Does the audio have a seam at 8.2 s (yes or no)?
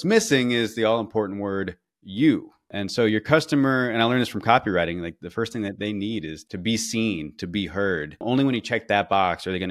yes